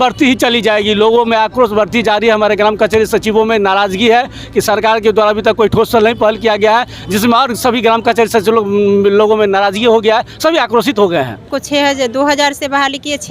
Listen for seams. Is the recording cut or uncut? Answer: cut